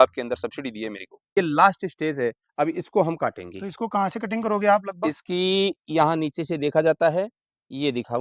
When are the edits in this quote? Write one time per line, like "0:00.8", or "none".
0:01.3